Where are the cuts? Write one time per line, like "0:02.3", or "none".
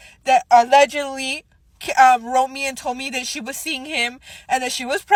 none